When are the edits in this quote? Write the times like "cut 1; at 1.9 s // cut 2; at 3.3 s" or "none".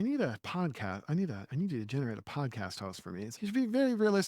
cut 1; at 3.3 s